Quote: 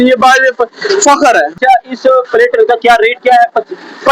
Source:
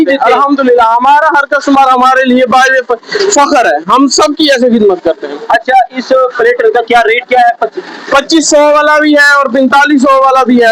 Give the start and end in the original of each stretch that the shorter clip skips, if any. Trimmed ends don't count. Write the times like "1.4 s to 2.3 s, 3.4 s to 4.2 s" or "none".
3.9 s to 5.6 s

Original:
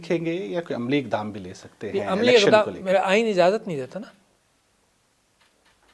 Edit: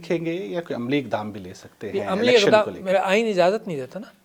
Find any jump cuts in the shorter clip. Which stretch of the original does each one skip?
none

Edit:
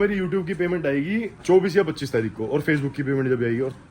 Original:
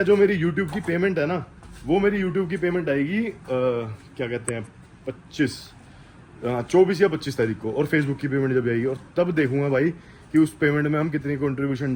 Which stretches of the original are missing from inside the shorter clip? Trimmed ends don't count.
3.4 s to 6.6 s

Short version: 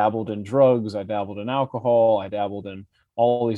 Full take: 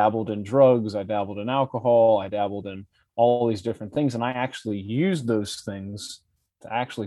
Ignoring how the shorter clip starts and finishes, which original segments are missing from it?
none

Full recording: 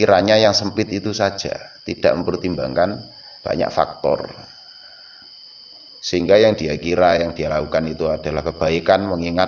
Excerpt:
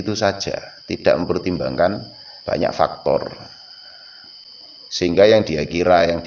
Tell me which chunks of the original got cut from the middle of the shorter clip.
5.4 s to 5.6 s

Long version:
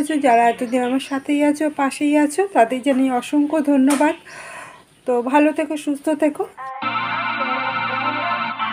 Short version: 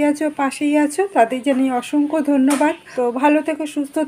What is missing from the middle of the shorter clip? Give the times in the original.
4.2 s to 5.0 s

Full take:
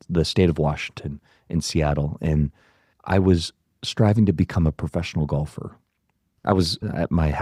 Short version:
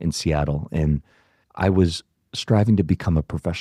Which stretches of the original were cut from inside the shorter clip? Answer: none

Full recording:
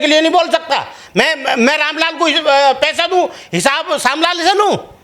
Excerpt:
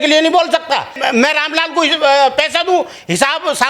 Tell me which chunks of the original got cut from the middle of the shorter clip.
0.9 s to 1.4 s

